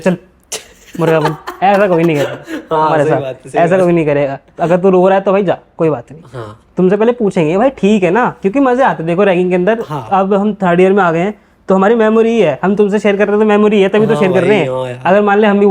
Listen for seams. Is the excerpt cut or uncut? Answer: uncut